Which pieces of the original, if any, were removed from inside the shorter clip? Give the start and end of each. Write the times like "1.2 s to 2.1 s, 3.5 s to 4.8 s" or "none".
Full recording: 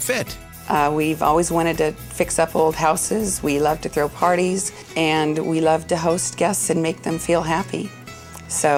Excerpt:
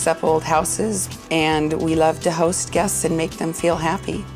3.4 s to 4.7 s